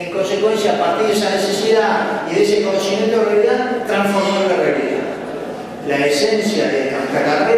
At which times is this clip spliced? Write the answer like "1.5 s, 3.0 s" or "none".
none